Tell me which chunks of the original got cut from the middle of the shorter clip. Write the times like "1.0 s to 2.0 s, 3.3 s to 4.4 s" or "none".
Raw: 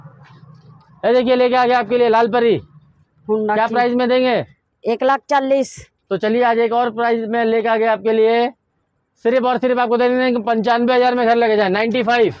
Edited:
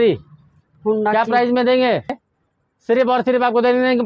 4.7 s to 8.6 s